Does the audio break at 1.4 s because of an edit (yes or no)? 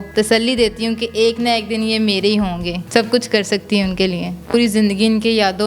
no